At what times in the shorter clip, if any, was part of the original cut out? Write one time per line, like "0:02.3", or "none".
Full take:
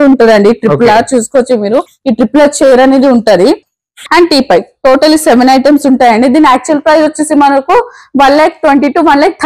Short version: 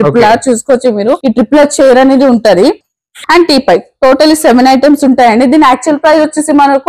0:01.2